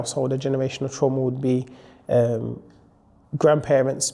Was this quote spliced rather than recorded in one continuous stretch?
no; 0 cuts

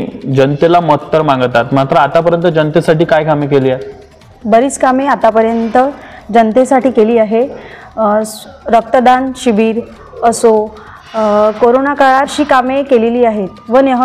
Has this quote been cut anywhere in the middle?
no; 0 cuts

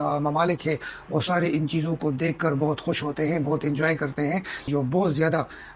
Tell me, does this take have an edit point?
yes; 1 cut; at 4.6 s

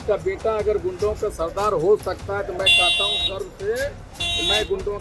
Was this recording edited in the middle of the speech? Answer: no; 0 cuts

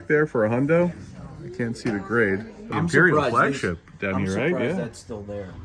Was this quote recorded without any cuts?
no; 1 cut; at 2.6 s

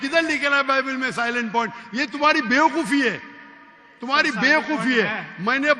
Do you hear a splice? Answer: no; 0 cuts

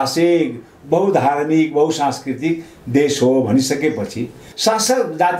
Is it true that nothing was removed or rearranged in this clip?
no; 1 cut; at 4.4 s

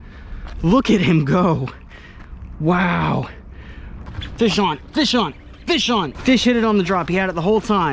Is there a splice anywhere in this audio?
yes; 2 cuts; at 4.3 s, 6.1 s

